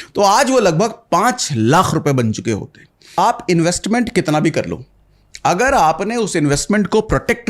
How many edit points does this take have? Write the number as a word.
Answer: one